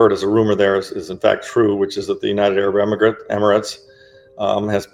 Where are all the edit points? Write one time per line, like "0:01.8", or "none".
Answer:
none